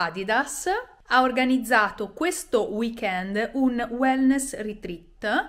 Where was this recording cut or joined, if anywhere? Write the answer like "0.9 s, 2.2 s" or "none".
0.9 s

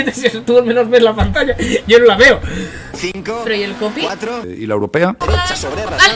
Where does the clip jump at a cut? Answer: 5.2 s

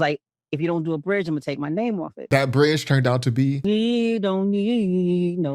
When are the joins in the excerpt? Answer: 2.3 s, 3.6 s

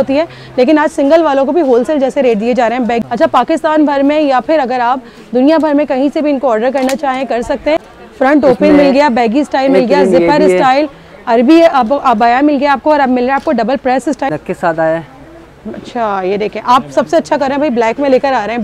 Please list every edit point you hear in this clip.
3.0 s, 8.0 s, 14.3 s

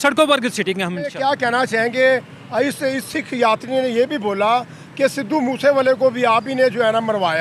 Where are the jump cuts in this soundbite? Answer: 1.1 s

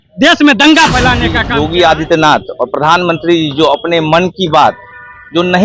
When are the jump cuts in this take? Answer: 1.4 s

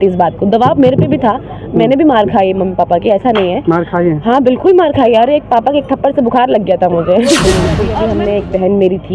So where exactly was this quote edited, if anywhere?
7.9 s

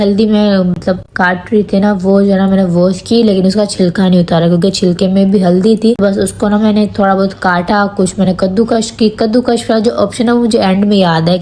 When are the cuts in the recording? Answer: none

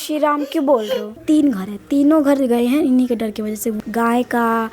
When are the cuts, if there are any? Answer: 1.2 s, 3.8 s

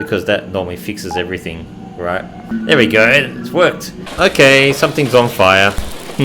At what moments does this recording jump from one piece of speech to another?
2.5 s, 4.1 s

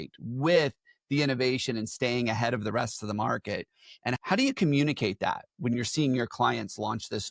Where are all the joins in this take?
4.2 s, 5.7 s

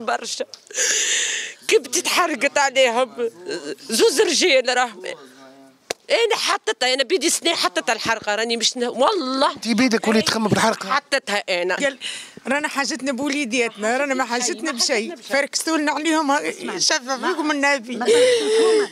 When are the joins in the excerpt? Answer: 11.8 s

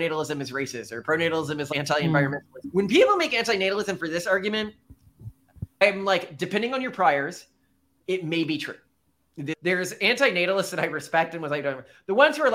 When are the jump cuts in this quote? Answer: 1.7 s, 2.6 s, 5.8 s, 9.5 s

